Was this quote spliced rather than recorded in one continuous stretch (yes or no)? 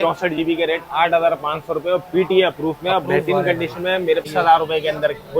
yes